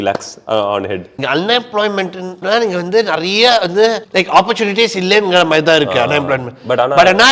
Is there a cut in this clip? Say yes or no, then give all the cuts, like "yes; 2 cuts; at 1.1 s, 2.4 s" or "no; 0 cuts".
yes; 1 cut; at 1.1 s